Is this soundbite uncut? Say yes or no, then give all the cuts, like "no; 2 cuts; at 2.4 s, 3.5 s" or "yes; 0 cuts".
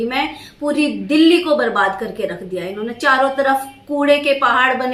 yes; 0 cuts